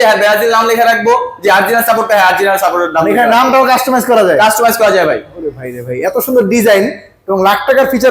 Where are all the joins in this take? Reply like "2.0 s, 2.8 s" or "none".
none